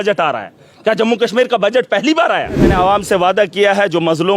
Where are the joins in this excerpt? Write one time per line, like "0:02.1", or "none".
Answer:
0:02.7